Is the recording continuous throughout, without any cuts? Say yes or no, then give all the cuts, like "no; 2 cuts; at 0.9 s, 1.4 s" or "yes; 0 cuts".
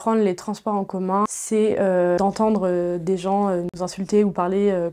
no; 2 cuts; at 1.3 s, 2.2 s